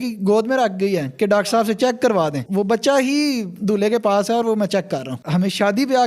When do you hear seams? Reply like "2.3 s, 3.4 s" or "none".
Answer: 2.4 s, 5.2 s